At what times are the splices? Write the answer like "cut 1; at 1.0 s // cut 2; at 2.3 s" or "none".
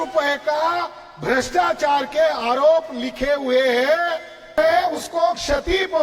cut 1; at 4.5 s